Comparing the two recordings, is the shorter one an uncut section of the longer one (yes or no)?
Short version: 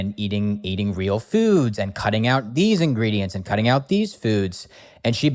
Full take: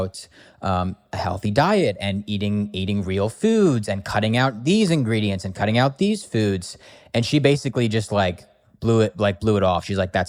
yes